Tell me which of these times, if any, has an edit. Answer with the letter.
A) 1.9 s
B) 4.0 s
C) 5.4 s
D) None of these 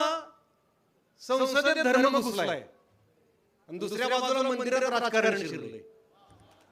D